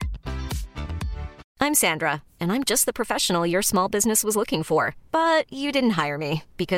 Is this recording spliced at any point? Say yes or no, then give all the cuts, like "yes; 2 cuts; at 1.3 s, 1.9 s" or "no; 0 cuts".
yes; 1 cut; at 1.4 s